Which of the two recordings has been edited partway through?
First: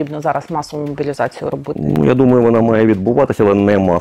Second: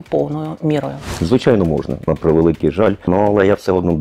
second; 3 cuts; at 1.1 s, 2.1 s, 3.1 s

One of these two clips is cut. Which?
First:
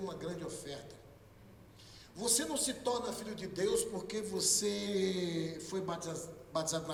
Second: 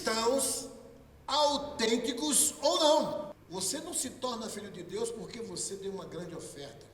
second; 1 cut; at 3.4 s

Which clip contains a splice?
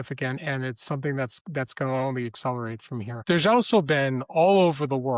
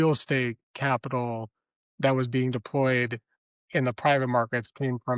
first; 1 cut; at 3.1 s

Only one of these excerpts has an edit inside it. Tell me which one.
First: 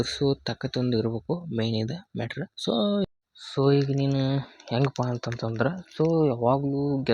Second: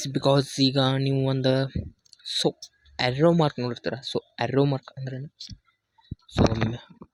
first; 1 cut; at 3.1 s

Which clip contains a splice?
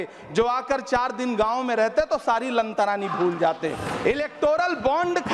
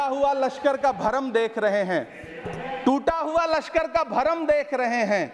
first; 1 cut; at 3.9 s

